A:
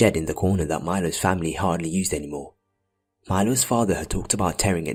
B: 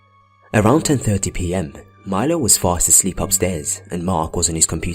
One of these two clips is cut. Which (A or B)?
B